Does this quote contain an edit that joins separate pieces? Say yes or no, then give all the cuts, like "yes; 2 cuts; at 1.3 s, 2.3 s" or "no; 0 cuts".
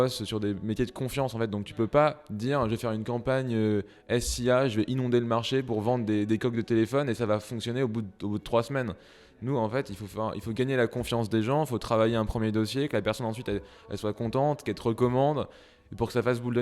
no; 0 cuts